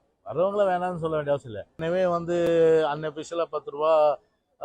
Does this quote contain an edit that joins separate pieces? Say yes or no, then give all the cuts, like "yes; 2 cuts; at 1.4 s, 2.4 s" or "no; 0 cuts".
yes; 1 cut; at 1.7 s